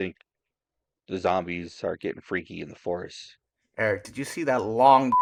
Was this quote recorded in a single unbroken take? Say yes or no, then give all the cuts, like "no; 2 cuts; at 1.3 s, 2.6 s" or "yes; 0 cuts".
yes; 0 cuts